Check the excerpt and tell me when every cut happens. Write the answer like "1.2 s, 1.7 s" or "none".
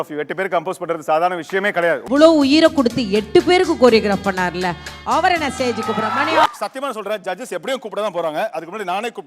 2.0 s, 6.5 s